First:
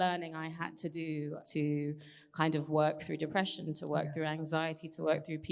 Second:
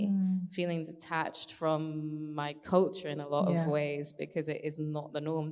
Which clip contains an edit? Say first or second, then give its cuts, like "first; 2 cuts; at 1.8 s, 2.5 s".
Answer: first; 1 cut; at 1.4 s